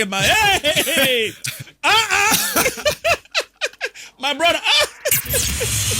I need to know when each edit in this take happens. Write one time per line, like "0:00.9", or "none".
none

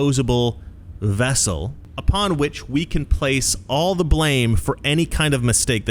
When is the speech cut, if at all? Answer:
0:01.8

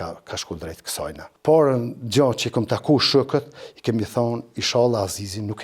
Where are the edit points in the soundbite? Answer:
0:01.3

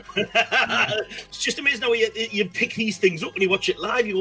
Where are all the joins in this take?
0:01.2

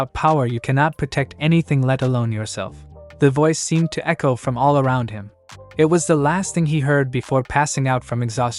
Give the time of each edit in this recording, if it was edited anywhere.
none

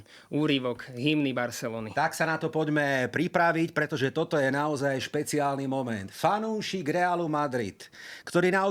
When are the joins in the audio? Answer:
none

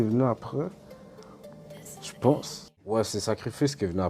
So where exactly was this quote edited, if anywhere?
0:03.0

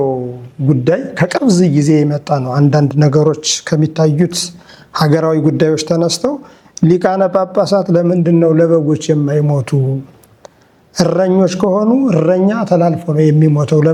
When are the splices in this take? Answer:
none

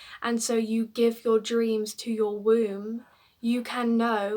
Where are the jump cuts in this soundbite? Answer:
none

